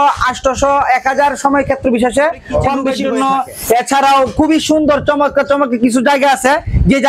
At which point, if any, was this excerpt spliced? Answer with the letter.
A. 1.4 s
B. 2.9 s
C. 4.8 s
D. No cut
B